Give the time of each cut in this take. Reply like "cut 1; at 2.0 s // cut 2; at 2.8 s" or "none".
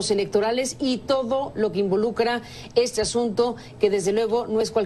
cut 1; at 2.0 s